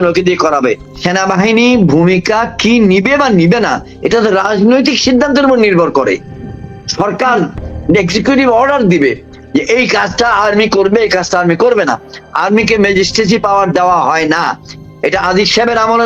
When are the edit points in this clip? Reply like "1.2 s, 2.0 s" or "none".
0.9 s

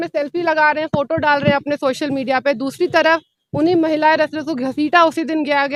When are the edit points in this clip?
none

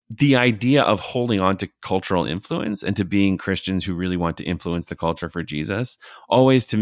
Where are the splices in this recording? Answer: none

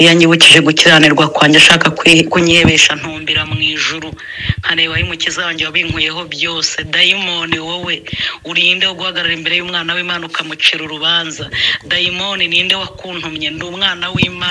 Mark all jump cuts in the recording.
none

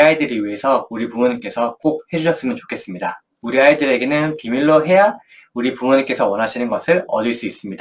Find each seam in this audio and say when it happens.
3.3 s

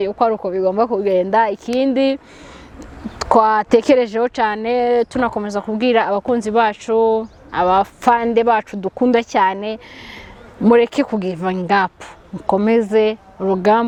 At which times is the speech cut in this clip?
none

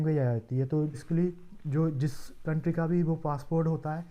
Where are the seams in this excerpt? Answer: 1.0 s

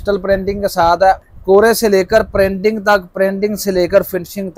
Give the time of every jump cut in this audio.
1.2 s

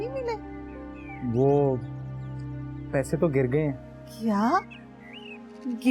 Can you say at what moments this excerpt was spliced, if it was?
none

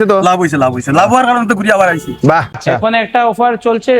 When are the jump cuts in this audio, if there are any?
2.6 s

